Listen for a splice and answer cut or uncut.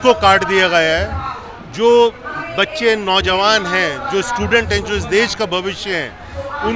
uncut